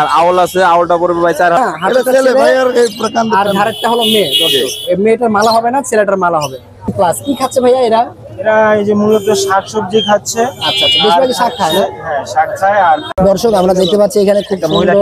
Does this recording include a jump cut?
yes; 3 cuts; at 1.6 s, 6.9 s, 13.0 s

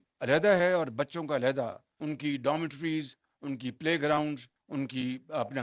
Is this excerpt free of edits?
no; 2 cuts; at 1.9 s, 4.5 s

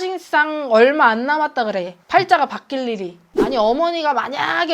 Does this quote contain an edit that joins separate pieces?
yes; 1 cut; at 3.2 s

